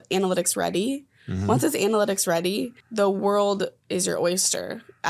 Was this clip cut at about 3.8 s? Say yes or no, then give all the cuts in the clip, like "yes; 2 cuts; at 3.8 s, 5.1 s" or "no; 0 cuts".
yes; 2 cuts; at 2.8 s, 3.8 s